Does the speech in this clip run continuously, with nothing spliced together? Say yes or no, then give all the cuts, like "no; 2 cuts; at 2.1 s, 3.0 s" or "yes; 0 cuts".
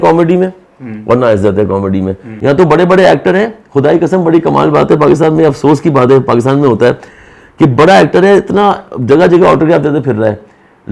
no; 1 cut; at 2.2 s